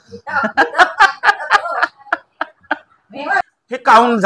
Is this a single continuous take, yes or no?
no